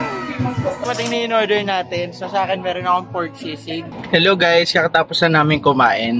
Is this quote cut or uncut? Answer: cut